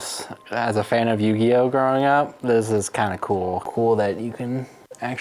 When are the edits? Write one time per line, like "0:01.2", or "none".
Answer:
0:03.7